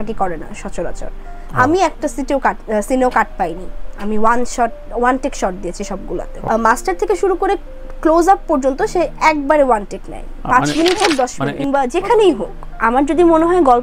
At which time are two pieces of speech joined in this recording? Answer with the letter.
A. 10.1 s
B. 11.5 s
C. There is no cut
B